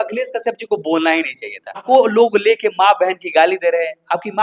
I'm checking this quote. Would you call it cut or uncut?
cut